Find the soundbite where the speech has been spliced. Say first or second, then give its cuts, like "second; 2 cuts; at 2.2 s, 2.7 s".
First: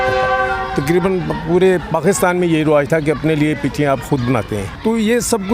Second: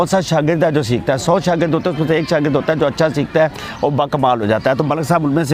first; 1 cut; at 4.6 s